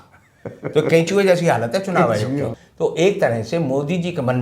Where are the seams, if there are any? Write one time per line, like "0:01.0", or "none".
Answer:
0:02.6